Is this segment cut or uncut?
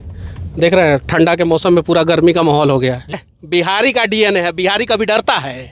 cut